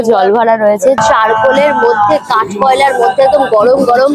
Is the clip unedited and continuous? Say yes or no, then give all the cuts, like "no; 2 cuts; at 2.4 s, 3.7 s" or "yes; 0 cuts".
no; 1 cut; at 1.0 s